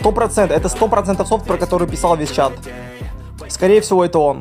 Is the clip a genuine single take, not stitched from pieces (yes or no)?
yes